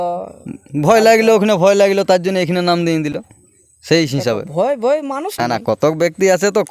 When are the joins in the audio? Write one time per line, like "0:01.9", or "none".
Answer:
none